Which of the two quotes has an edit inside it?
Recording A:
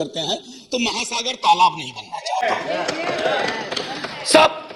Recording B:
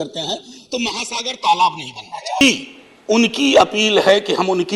B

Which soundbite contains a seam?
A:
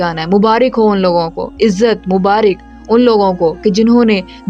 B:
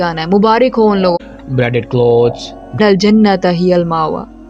B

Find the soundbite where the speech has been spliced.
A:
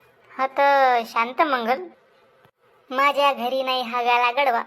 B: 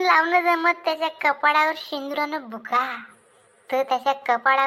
A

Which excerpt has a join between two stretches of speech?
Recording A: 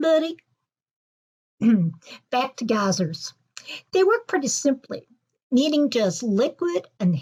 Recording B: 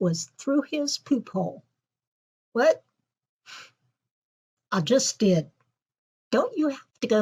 B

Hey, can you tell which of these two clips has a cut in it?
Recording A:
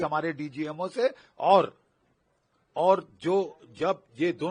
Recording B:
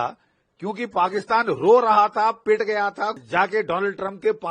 B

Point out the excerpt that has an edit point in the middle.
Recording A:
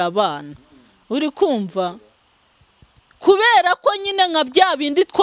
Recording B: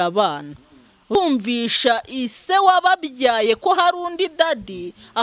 B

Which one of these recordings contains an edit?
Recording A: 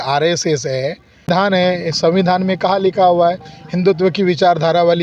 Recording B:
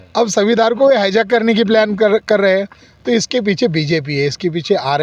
A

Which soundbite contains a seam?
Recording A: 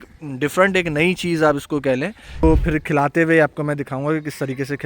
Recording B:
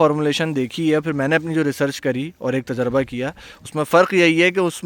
A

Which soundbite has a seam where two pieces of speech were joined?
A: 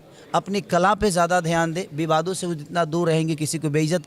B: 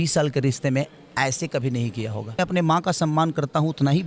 B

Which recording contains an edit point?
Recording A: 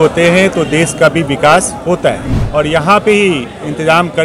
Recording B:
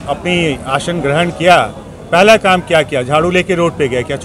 A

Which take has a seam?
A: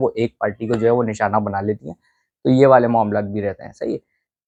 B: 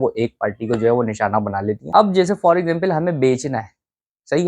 B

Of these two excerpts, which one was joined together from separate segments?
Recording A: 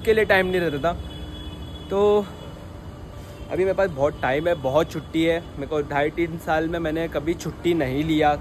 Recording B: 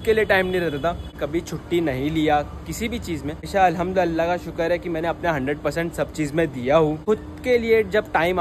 B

